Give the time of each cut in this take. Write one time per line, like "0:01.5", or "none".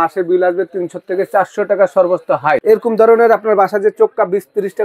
0:02.6